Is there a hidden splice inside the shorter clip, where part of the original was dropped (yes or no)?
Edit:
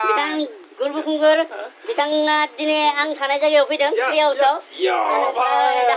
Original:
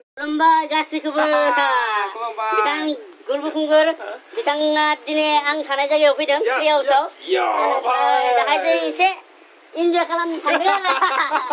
no